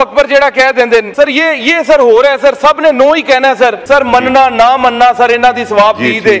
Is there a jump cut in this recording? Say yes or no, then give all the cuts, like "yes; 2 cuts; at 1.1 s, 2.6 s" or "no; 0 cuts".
yes; 2 cuts; at 1.1 s, 3.8 s